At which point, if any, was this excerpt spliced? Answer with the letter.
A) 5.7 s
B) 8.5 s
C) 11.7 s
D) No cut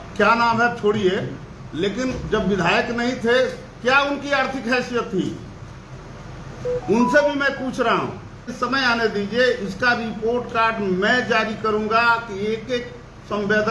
B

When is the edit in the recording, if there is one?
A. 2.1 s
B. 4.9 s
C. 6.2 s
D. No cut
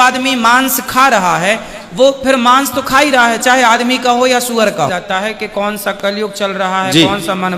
B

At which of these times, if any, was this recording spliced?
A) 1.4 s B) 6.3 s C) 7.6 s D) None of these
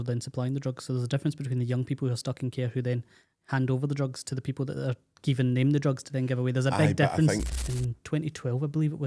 C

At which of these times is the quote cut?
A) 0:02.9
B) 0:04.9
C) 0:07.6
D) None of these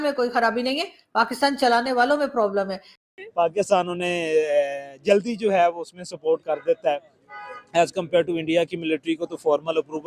A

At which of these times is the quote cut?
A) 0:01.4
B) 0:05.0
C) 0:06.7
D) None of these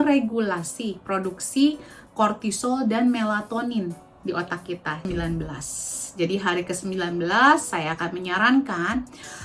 B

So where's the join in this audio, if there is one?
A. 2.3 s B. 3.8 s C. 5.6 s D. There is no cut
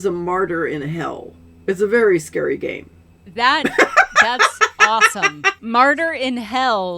C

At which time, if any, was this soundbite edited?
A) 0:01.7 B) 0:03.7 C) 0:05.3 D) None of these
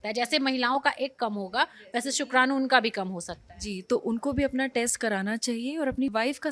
D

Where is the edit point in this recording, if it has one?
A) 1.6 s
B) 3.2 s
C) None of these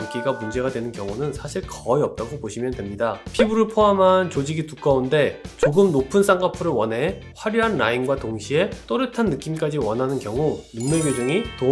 B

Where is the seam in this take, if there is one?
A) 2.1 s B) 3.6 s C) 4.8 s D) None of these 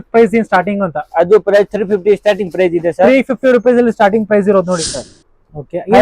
C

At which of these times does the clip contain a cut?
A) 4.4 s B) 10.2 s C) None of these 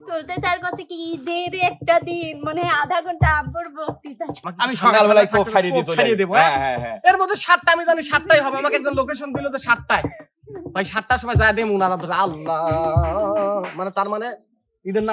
A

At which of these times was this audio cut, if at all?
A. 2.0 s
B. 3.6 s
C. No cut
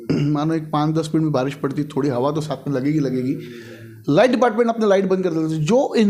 C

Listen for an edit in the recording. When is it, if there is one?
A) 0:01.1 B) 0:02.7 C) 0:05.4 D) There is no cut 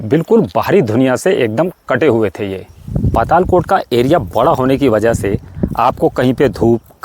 B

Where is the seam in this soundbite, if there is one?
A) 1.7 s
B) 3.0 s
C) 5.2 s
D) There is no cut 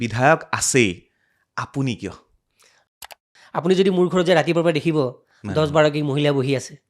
B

